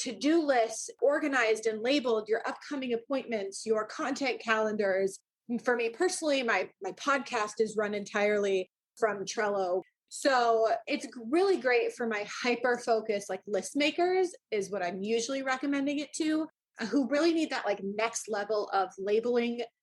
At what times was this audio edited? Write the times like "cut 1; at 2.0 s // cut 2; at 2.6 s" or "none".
cut 1; at 5.3 s // cut 2; at 9.8 s